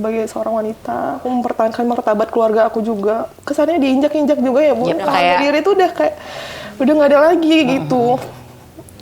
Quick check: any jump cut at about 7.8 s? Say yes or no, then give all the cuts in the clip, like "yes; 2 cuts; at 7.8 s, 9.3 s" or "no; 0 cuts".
no; 3 cuts; at 1.2 s, 3.3 s, 5.1 s